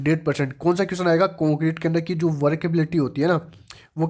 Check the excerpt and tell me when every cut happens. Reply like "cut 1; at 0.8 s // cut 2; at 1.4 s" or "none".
none